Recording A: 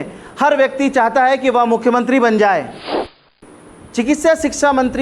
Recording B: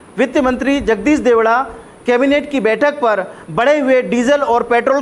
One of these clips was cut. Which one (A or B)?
A